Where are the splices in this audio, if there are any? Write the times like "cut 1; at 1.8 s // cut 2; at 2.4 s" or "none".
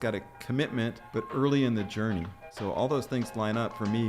cut 1; at 1.0 s // cut 2; at 2.5 s